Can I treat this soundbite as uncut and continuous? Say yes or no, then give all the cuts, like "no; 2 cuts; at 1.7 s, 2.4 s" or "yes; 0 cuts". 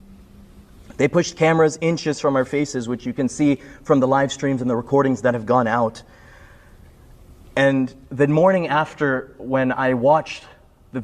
yes; 0 cuts